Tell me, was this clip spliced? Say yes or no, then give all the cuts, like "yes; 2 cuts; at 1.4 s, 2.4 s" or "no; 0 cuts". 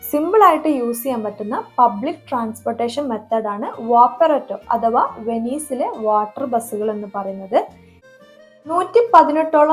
yes; 1 cut; at 8.0 s